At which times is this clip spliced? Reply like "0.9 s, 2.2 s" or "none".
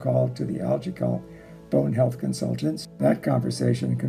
2.9 s